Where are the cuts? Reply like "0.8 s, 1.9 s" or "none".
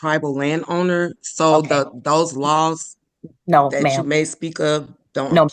none

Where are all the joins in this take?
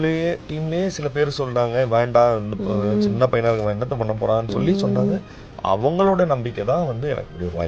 none

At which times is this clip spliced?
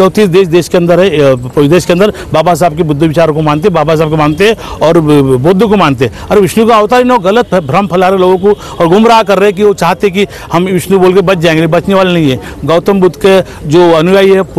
none

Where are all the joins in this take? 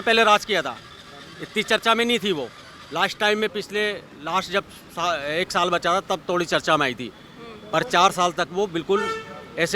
none

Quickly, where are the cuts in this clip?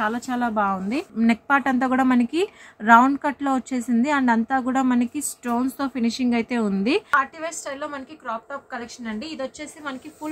1.1 s, 7.1 s

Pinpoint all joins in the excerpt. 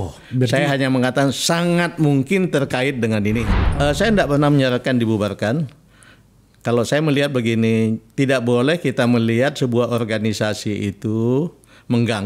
3.6 s

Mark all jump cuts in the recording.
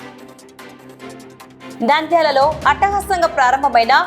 1.5 s

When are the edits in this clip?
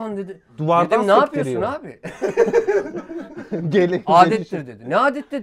none

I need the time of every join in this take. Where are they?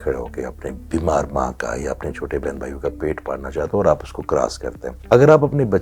0.8 s, 4.9 s

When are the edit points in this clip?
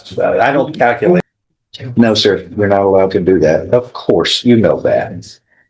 1.2 s

